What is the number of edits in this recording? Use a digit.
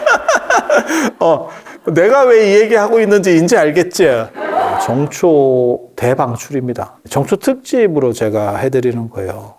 2